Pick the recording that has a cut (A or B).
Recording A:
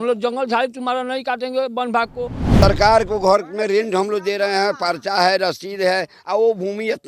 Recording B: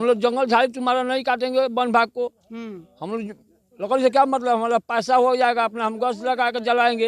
A